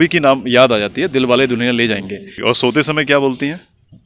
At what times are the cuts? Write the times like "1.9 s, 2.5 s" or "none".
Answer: 2.3 s

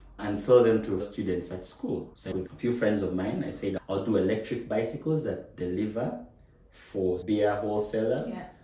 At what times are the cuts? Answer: 2.1 s

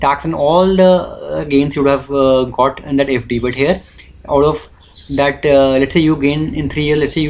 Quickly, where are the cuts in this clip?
none

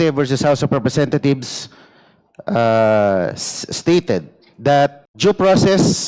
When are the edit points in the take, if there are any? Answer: 5.1 s

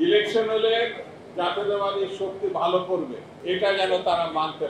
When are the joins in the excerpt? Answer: 3.3 s

